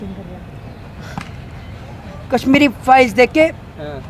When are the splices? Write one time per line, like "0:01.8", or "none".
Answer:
none